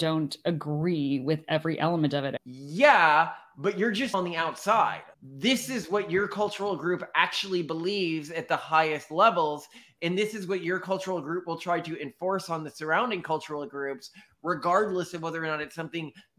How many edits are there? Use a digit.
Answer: 1